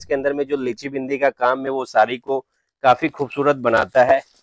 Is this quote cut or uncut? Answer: uncut